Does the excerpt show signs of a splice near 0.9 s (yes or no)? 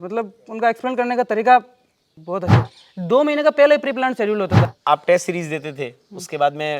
no